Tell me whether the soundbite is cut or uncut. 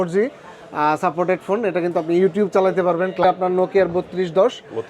cut